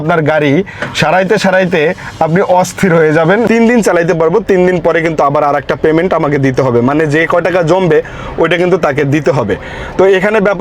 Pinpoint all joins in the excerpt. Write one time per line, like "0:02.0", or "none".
0:03.5